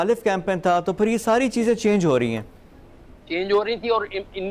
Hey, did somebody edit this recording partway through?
no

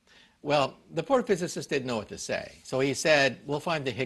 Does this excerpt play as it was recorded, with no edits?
yes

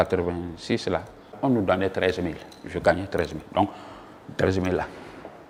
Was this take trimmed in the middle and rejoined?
no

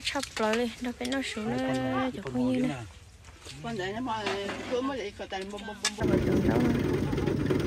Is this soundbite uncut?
no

